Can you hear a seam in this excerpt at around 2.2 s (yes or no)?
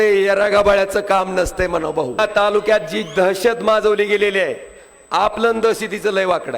yes